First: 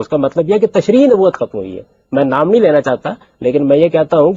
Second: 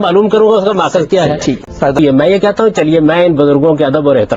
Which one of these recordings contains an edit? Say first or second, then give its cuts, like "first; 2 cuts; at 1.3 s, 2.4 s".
second; 1 cut; at 2.0 s